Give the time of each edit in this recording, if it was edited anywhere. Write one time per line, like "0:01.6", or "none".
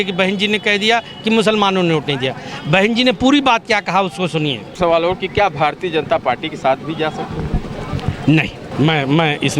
0:04.8
0:08.7

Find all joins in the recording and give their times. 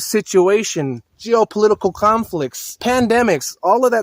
0:02.8

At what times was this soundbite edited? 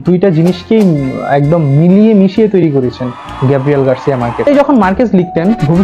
0:04.5

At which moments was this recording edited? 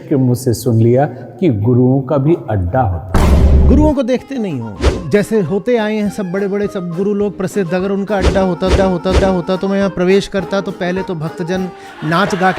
none

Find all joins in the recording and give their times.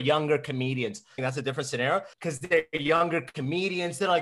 0:01.2
0:02.1

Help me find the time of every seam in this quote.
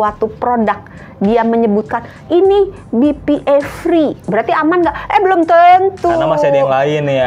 0:04.2

